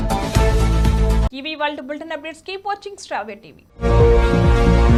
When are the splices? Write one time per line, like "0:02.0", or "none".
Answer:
none